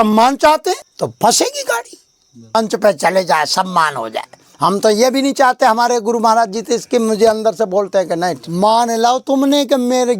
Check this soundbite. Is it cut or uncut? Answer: cut